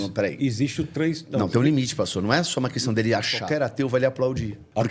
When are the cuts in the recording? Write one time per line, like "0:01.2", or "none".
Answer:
0:03.4